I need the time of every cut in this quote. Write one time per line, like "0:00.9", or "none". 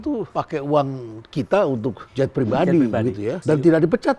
none

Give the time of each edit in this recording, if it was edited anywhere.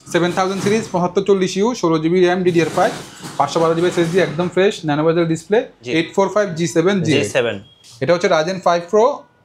0:05.8

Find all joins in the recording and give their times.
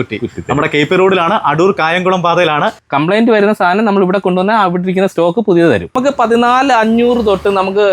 0:02.8
0:05.9

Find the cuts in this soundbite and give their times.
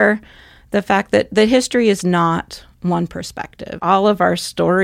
0:03.8

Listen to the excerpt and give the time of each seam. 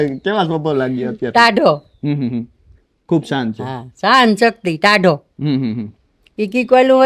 none

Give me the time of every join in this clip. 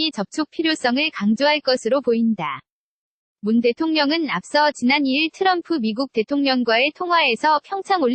none

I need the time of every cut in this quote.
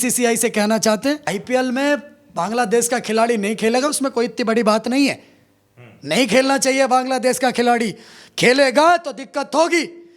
0:01.4

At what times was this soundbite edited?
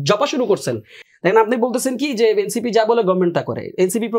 0:01.0

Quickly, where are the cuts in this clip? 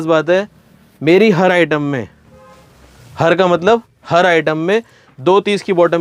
none

